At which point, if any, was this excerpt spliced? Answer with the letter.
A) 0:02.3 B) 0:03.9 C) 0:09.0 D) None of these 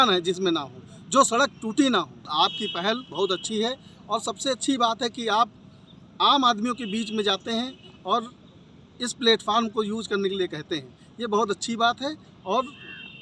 A